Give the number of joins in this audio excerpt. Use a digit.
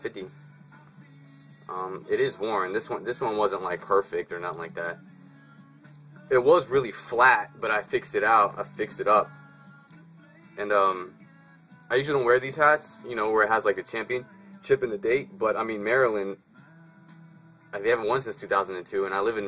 1